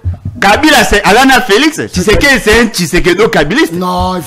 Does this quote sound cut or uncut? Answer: uncut